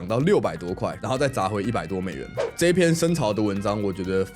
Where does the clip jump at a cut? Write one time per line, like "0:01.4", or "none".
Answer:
0:01.0
0:02.4